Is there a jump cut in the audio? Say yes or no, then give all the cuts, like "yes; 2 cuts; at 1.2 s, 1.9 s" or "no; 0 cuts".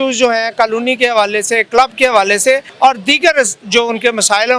yes; 1 cut; at 2.7 s